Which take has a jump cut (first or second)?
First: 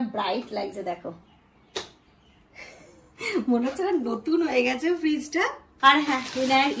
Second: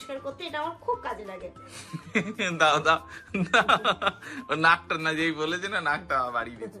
first